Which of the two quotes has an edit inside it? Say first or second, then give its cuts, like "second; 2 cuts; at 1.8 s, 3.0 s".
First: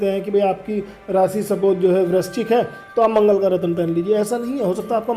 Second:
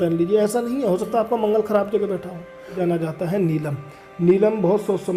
second; 1 cut; at 2.8 s